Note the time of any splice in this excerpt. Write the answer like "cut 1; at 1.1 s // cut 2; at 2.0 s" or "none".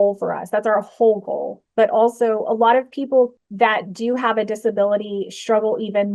none